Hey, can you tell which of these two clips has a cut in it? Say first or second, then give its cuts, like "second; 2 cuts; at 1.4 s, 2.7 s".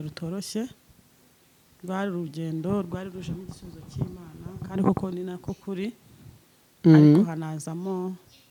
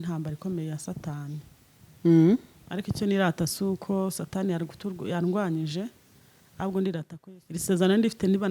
second; 1 cut; at 7.1 s